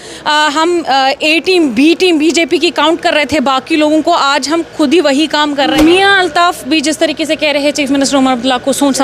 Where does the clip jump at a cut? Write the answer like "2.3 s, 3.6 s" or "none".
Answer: 5.7 s

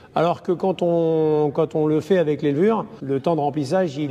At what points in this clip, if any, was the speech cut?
2.9 s

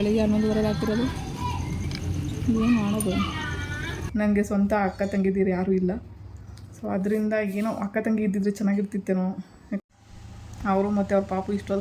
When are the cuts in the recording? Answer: 4.1 s, 9.8 s

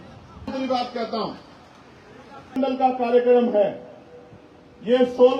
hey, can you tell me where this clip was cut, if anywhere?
2.5 s

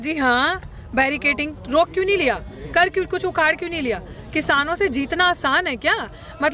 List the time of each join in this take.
none

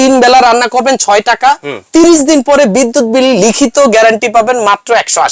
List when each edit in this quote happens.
none

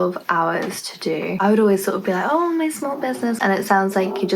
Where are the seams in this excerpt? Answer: 1.3 s, 3.4 s

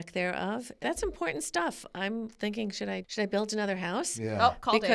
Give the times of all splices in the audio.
none

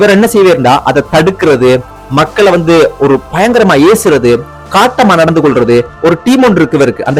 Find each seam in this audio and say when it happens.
none

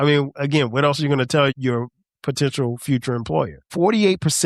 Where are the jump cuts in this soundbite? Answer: 1.5 s, 3.6 s

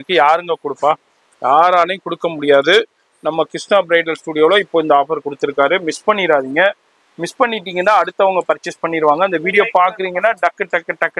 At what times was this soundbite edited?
none

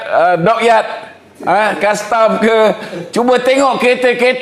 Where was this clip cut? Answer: none

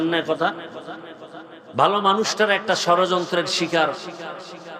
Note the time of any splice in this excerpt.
none

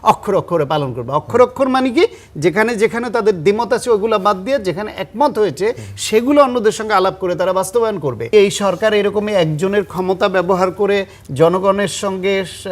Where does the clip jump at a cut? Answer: 8.3 s

